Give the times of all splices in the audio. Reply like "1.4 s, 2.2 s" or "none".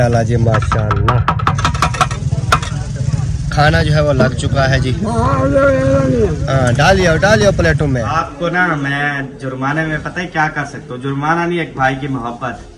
8.1 s